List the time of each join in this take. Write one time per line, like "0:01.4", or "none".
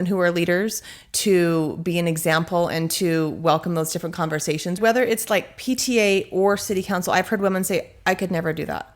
0:04.8